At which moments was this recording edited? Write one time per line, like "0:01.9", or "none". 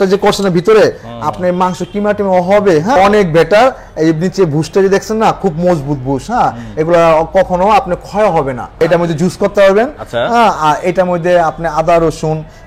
0:03.0
0:08.8